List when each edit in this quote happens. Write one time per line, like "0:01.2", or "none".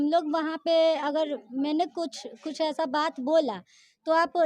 none